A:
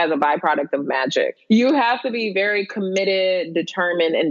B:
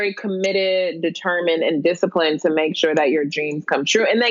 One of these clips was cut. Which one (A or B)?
A